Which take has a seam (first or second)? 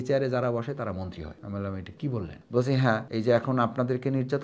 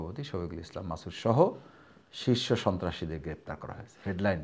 first